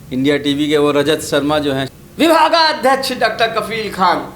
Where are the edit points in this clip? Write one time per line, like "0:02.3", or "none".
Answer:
0:01.9